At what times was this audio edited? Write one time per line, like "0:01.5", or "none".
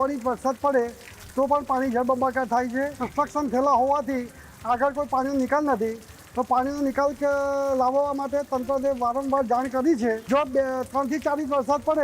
0:03.0
0:10.2